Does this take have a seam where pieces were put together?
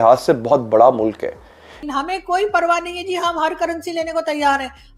yes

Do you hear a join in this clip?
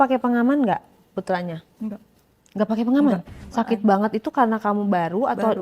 yes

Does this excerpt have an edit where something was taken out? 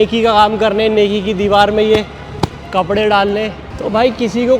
yes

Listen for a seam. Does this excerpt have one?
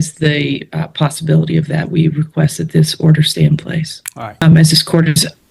yes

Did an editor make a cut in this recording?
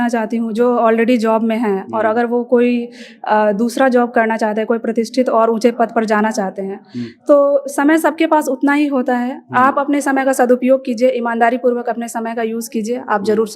no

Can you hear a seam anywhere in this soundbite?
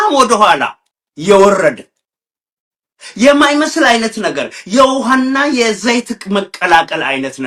no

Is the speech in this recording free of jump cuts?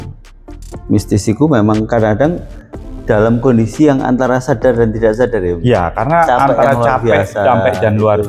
yes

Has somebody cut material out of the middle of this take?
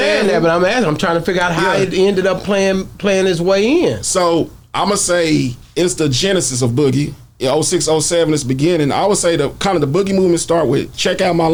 no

